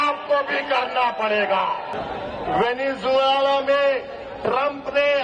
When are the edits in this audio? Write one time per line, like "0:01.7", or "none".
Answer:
0:01.9